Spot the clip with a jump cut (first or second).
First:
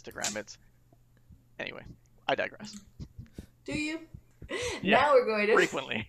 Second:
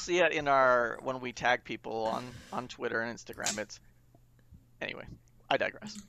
first